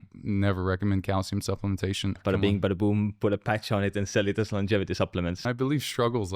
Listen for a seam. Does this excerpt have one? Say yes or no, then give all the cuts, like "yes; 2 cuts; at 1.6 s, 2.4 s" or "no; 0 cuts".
yes; 2 cuts; at 2.2 s, 5.4 s